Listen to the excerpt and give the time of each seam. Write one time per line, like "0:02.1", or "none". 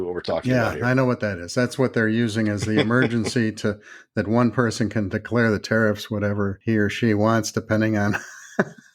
0:06.6